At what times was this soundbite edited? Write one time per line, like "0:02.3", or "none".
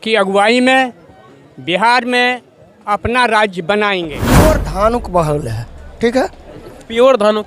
0:04.2